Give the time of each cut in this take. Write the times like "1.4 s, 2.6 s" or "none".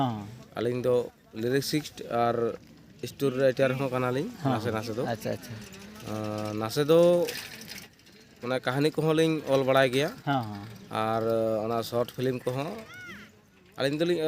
none